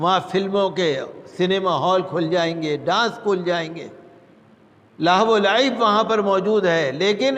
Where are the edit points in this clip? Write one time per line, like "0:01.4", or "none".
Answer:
none